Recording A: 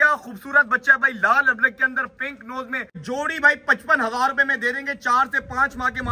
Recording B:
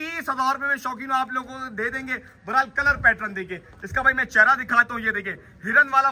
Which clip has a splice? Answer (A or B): A